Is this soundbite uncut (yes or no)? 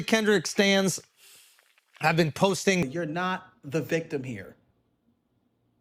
no